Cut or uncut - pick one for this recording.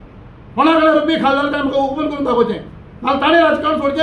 uncut